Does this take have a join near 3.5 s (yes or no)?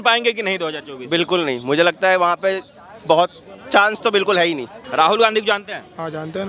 no